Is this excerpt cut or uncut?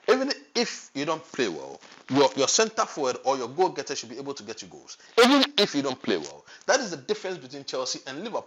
uncut